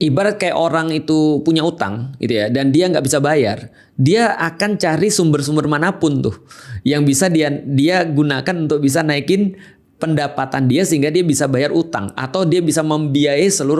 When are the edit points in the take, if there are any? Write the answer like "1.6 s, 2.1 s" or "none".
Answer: none

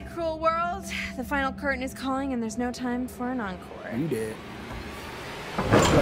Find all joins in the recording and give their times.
none

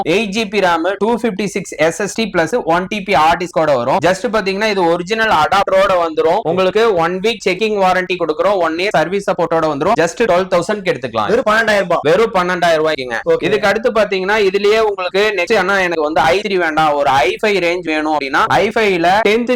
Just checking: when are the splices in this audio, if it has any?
none

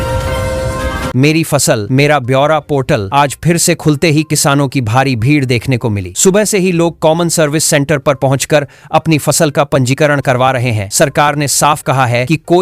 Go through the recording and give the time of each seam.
1.0 s

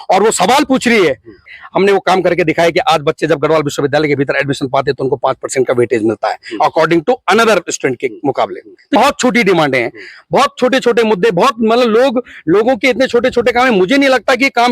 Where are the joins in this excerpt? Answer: 1.5 s, 8.7 s

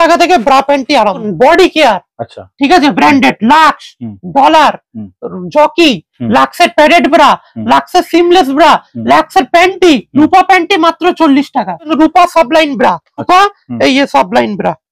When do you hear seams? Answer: 1.3 s, 11.9 s, 13.2 s

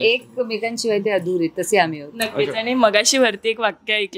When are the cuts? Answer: none

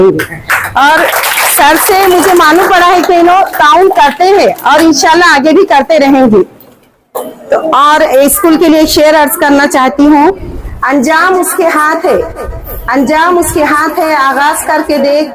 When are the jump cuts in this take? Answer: none

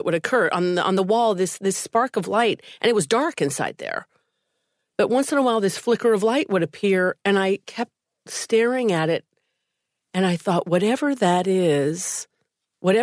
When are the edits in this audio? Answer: 1.0 s

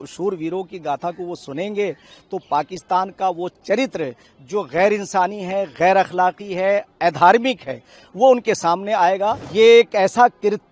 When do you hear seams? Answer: 9.4 s

